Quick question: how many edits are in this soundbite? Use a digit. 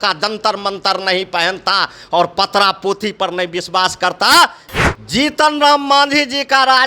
1